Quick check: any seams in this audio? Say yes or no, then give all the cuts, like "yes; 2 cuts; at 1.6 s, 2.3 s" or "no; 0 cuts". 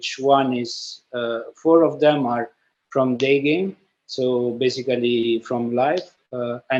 no; 0 cuts